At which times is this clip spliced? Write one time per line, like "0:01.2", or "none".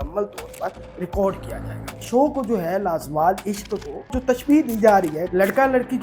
0:02.0
0:04.2
0:05.2